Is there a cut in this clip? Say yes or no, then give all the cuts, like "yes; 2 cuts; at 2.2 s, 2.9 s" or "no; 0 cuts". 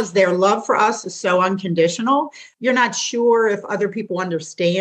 yes; 1 cut; at 2.4 s